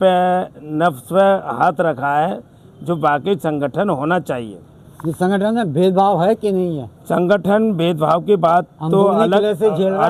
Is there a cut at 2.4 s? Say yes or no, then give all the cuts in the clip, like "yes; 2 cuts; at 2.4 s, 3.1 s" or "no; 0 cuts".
no; 0 cuts